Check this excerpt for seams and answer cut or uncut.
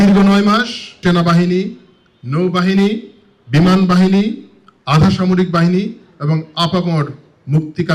cut